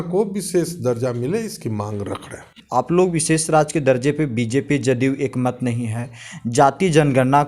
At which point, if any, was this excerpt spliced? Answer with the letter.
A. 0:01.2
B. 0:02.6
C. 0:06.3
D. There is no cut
B